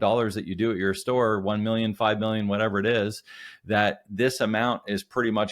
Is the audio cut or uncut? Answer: uncut